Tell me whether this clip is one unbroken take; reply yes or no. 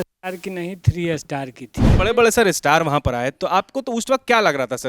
no